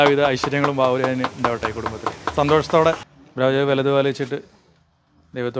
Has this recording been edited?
yes; 1 cut; at 3.2 s

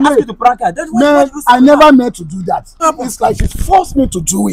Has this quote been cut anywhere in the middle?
yes; 1 cut; at 2.8 s

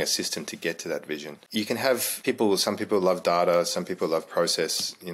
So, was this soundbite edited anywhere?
yes; 2 cuts; at 1.4 s, 2.1 s

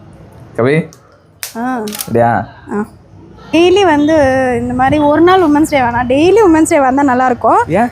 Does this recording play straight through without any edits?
no; 1 cut; at 3.5 s

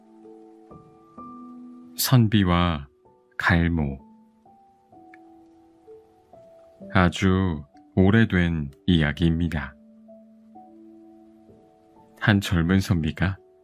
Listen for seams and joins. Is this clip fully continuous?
no; 1 cut; at 1.5 s

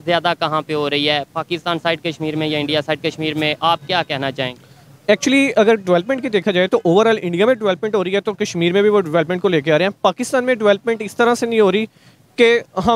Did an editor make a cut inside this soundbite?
no; 0 cuts

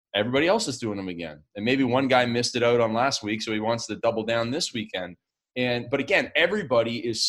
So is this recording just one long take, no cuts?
yes; 0 cuts

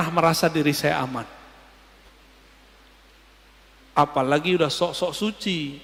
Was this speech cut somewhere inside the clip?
no; 0 cuts

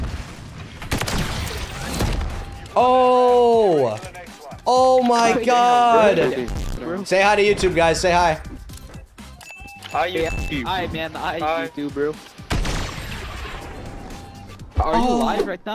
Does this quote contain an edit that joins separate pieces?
no; 0 cuts

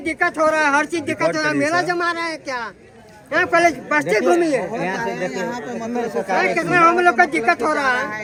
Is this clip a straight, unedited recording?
yes; 0 cuts

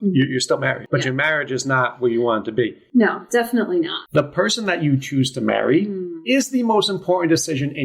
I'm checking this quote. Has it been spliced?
yes; 3 cuts; at 0.8 s, 2.8 s, 4.0 s

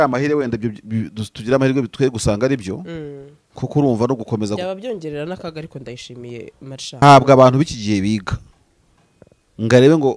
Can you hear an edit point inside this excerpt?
yes; 1 cut; at 7.0 s

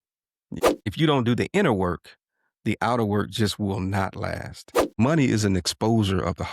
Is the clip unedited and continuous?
no; 2 cuts; at 0.8 s, 5.0 s

